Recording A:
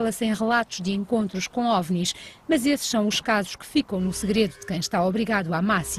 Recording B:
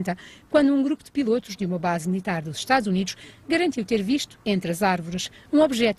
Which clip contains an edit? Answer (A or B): B